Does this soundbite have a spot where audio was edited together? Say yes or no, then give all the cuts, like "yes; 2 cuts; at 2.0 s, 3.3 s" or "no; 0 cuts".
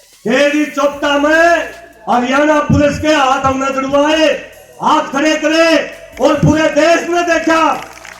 no; 0 cuts